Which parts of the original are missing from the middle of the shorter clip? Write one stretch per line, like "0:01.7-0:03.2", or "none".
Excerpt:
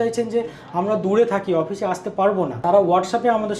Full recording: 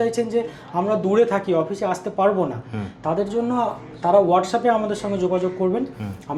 0:02.6-0:04.0